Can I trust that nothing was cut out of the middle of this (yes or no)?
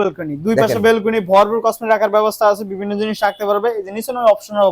yes